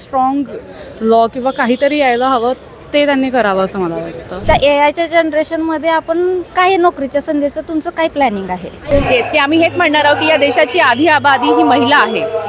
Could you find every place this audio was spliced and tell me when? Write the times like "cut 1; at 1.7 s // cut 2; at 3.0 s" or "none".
cut 1; at 4.4 s // cut 2; at 8.8 s